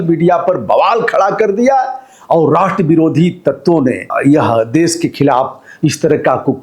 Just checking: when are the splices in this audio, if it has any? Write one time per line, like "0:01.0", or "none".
0:04.1